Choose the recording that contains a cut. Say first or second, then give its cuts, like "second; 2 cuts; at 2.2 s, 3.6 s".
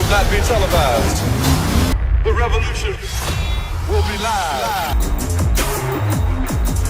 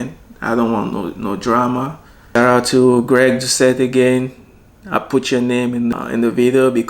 second; 2 cuts; at 2.4 s, 5.9 s